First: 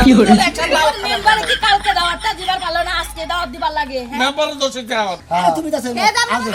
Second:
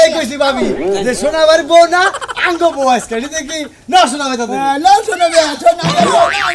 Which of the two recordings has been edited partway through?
first; 1 cut; at 5.3 s

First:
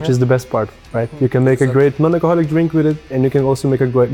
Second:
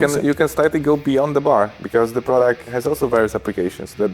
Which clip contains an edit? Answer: second; 2 cuts; at 1.8 s, 2.7 s

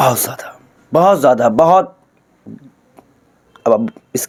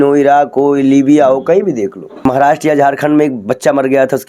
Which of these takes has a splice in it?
second; 1 cut; at 2.1 s

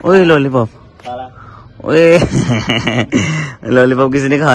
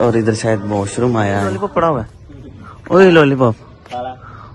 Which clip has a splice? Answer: second; 1 cut; at 1.5 s

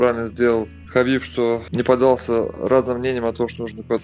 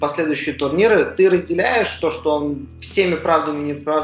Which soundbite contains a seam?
first; 1 cut; at 1.7 s

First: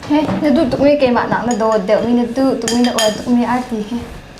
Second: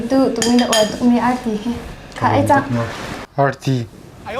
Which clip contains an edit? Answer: second; 1 cut; at 3.2 s

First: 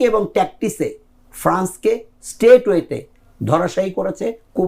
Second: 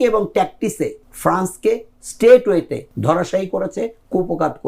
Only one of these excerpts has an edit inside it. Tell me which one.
second; 2 cuts; at 1.1 s, 2.8 s

